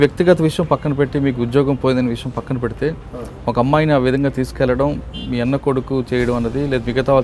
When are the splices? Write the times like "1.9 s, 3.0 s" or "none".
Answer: none